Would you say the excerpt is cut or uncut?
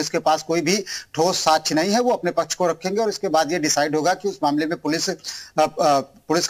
uncut